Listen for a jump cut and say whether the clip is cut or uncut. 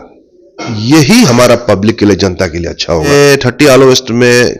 cut